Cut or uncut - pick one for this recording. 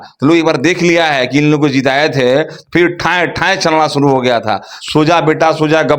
cut